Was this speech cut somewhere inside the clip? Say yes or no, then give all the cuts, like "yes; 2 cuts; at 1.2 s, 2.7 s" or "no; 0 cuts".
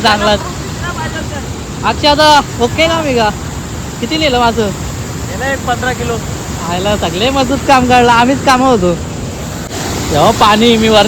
yes; 1 cut; at 9.7 s